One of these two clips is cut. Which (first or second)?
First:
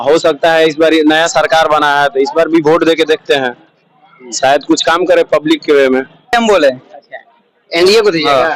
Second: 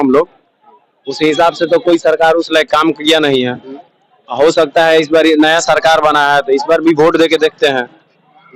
first